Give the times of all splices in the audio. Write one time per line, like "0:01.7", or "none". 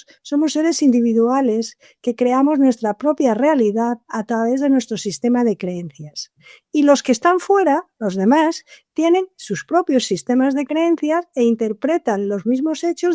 none